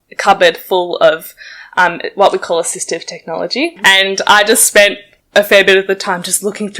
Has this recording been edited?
yes; 1 cut; at 3.7 s

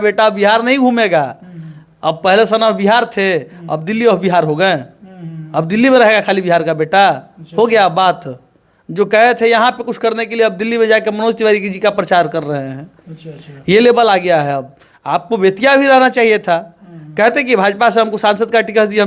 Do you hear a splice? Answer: no; 0 cuts

